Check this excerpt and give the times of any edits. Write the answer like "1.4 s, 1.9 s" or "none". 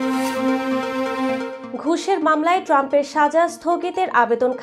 1.6 s